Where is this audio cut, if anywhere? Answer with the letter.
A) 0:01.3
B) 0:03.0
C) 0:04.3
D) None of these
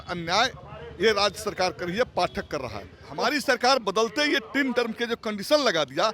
B